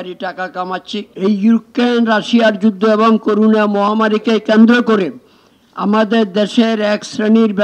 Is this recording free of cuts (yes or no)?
no